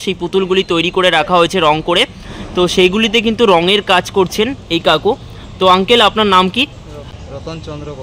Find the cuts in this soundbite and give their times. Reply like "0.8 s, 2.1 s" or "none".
none